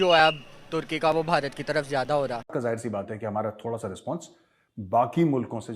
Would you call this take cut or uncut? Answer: cut